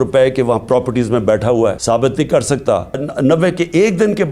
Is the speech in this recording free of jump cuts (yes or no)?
no